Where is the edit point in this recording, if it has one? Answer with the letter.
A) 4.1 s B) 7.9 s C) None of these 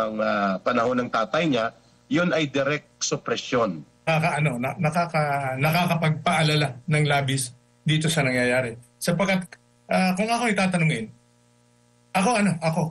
A